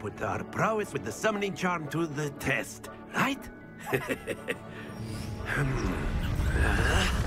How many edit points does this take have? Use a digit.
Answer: 0